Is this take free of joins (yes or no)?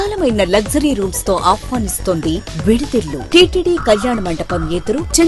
no